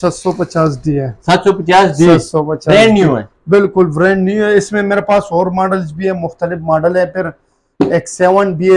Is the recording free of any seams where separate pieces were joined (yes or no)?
yes